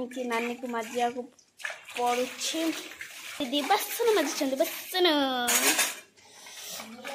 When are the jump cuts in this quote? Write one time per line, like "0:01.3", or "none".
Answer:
0:03.4